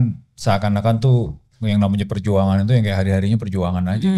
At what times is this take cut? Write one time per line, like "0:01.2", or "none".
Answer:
none